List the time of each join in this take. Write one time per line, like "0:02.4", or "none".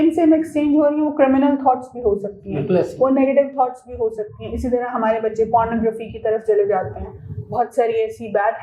none